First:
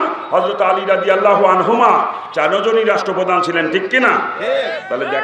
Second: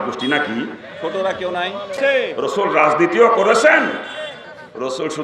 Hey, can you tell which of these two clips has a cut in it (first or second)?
second